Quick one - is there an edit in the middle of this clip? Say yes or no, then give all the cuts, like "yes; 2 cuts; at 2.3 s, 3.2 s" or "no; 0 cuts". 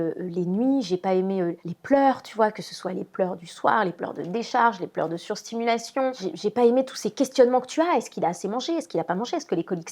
no; 0 cuts